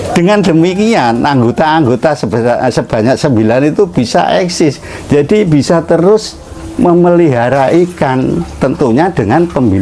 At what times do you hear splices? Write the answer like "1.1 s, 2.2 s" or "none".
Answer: none